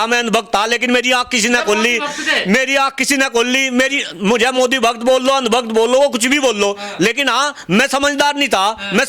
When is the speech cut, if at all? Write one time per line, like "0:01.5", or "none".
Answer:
none